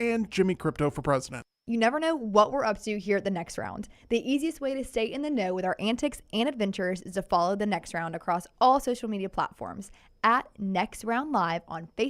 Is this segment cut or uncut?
cut